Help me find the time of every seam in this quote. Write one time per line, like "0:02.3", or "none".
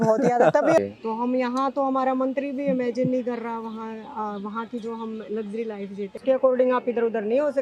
0:00.8
0:06.2